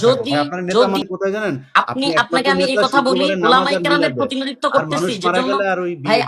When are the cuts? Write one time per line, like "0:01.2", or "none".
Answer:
0:01.0